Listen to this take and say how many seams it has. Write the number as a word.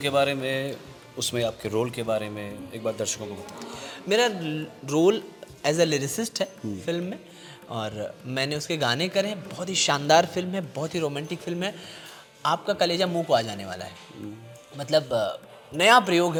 zero